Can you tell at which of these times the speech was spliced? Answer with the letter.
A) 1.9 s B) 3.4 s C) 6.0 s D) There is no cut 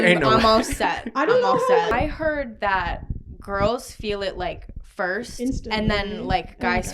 A